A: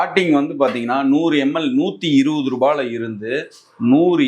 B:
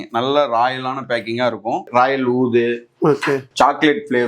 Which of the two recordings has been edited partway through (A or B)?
B